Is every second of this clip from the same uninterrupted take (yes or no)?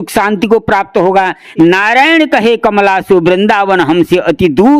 no